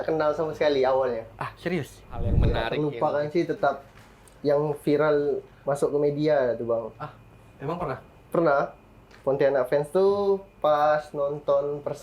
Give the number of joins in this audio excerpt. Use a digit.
1